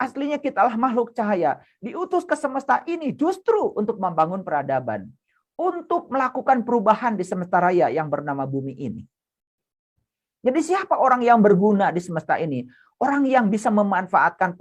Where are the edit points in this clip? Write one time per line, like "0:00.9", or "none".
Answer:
none